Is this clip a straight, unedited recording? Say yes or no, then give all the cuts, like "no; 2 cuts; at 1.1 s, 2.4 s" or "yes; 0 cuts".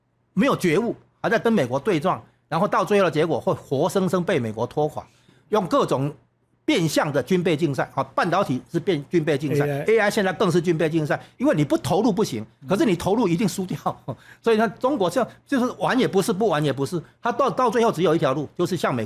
yes; 0 cuts